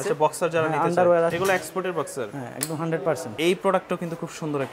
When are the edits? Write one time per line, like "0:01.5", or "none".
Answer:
0:01.3
0:03.3